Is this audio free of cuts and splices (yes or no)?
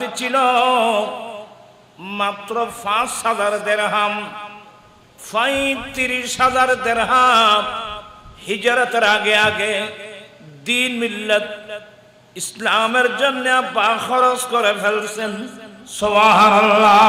yes